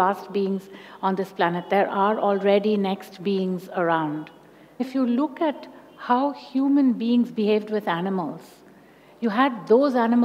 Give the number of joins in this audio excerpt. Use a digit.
1